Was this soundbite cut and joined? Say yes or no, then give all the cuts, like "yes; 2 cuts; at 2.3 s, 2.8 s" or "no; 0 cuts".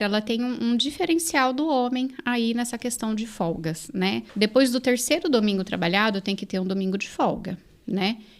yes; 1 cut; at 4.2 s